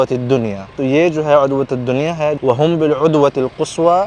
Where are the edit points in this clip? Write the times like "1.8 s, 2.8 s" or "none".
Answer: 0.8 s, 2.4 s